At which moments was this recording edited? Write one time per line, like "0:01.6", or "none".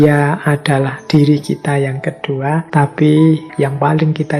0:02.7
0:03.5